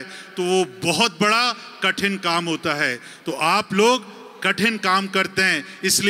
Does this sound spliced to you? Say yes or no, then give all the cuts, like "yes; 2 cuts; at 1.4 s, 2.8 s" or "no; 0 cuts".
no; 0 cuts